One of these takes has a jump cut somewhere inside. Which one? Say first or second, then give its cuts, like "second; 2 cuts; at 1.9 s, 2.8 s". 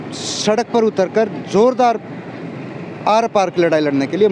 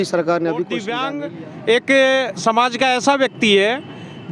second; 1 cut; at 1.0 s